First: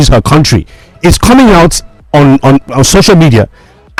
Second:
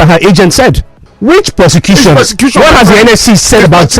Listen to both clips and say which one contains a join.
second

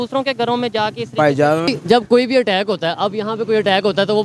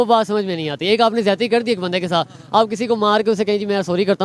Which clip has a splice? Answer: first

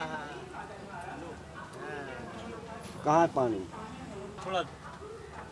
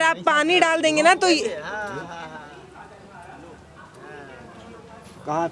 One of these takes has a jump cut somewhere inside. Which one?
first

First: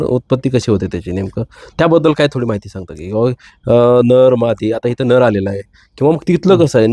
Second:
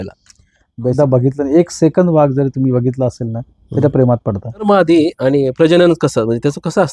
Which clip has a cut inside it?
second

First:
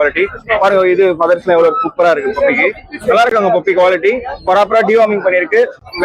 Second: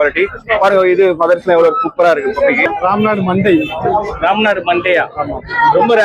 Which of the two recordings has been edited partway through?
second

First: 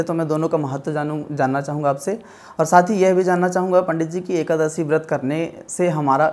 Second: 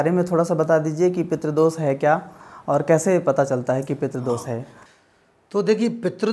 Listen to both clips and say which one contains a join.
second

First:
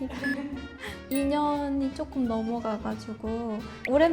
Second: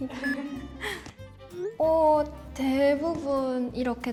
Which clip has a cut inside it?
first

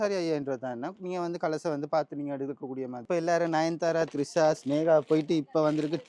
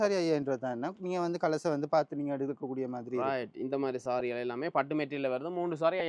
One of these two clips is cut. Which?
first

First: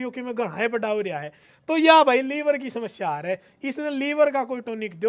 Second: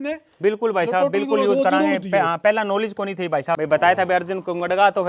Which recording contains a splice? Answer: second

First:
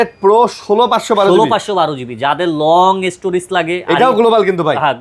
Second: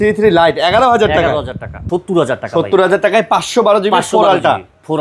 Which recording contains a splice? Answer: second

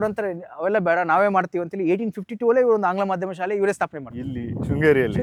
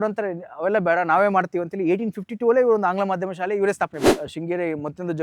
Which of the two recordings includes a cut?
second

